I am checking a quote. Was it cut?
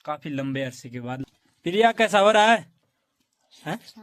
yes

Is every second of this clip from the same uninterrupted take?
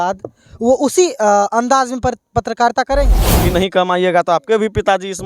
no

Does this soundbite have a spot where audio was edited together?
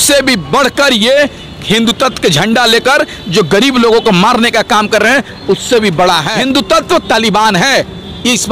yes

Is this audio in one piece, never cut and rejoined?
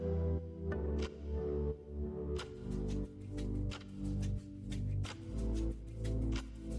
yes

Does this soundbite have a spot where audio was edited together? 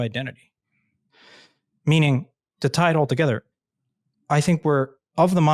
no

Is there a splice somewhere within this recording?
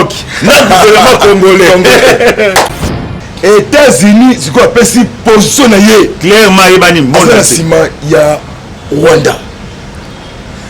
yes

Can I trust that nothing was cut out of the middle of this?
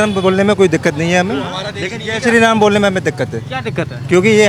yes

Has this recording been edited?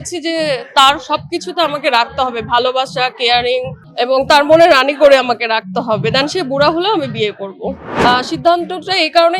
yes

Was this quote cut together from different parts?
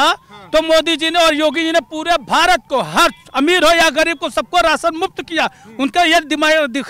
no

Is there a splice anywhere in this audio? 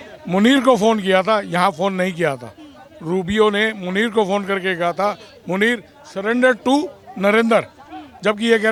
no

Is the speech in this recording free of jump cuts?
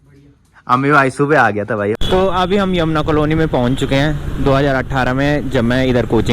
no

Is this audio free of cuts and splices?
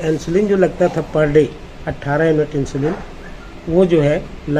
yes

